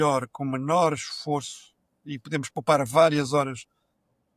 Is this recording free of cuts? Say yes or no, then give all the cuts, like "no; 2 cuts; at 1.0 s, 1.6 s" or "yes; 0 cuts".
yes; 0 cuts